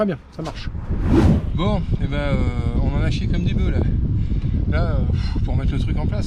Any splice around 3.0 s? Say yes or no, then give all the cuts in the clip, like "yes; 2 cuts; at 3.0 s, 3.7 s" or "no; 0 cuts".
no; 1 cut; at 1.5 s